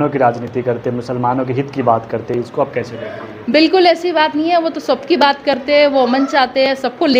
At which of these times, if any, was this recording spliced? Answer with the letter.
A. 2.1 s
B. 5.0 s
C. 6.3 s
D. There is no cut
D